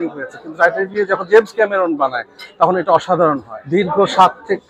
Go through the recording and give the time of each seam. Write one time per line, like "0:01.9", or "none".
0:03.5